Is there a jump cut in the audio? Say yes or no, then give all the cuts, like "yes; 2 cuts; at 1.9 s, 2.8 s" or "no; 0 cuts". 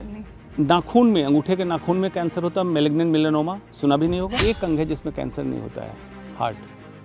yes; 1 cut; at 4.3 s